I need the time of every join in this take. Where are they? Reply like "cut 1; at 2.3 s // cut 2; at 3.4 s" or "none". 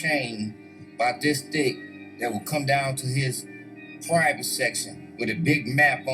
cut 1; at 1.1 s